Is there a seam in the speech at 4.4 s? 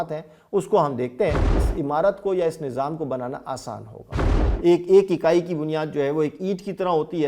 yes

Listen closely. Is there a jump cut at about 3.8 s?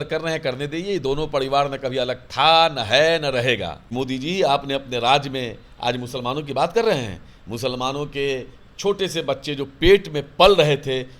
yes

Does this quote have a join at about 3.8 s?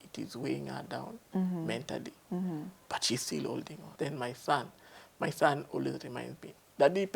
yes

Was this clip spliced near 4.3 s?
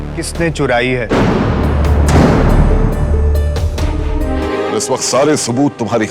yes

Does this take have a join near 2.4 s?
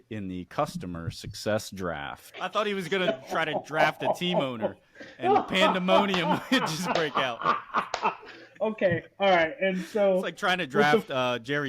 yes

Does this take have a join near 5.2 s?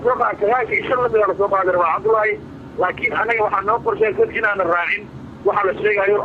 no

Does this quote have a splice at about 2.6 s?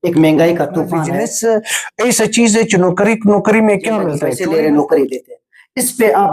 no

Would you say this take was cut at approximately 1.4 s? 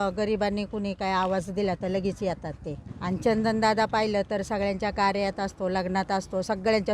no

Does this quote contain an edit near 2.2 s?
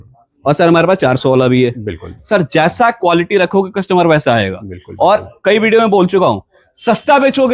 no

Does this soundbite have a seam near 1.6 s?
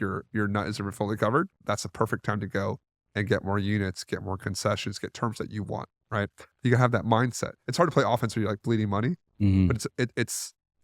yes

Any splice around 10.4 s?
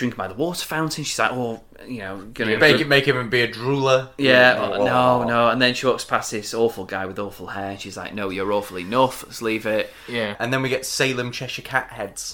yes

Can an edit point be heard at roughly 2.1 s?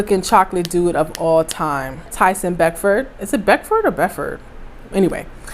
yes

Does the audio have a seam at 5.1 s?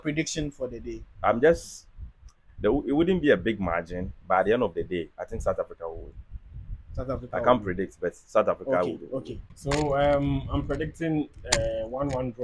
no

